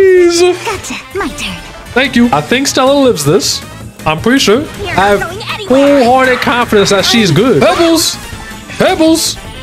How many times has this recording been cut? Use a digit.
2